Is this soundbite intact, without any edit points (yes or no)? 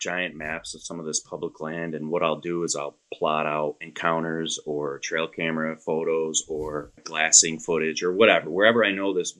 no